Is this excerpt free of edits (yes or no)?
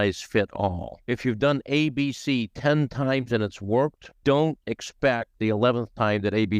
no